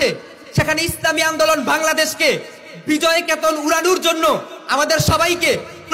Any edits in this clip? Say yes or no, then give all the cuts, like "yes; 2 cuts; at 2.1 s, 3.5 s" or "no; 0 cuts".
no; 0 cuts